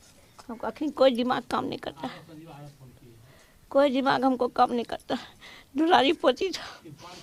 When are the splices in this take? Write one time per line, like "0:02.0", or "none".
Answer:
none